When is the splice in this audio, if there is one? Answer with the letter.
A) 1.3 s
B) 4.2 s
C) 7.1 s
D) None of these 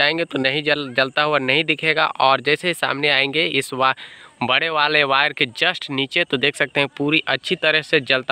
D